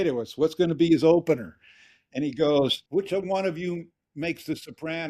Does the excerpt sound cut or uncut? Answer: cut